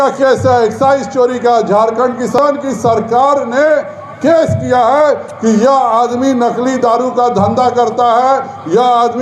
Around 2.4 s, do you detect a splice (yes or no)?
yes